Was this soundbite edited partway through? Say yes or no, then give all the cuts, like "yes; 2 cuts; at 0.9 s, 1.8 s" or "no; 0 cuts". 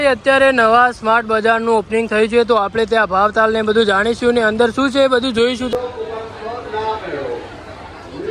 no; 0 cuts